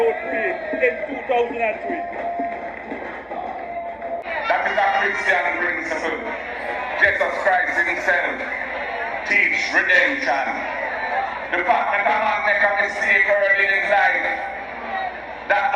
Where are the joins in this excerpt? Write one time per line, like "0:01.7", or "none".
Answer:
0:04.2

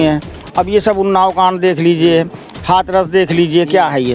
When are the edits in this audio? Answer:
none

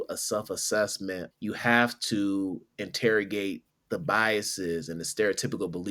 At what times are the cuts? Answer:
0:01.3

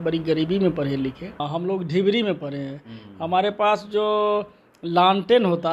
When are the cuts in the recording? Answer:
0:01.4

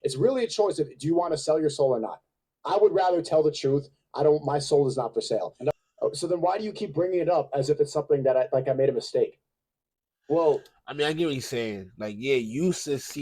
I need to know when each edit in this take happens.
0:05.7

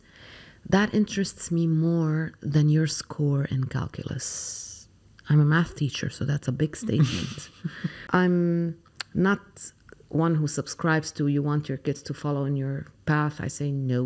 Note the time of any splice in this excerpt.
0:07.9

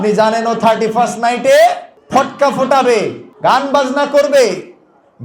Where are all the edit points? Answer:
0:01.9
0:03.2

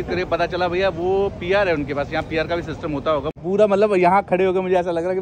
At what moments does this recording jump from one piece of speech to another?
0:03.4

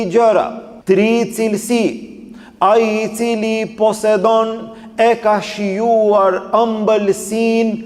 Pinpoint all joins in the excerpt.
none

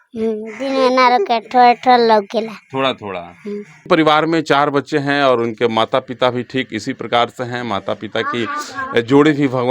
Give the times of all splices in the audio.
0:03.9

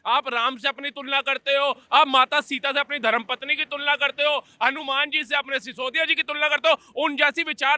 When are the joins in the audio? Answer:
none

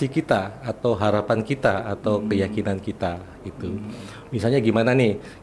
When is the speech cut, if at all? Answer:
none

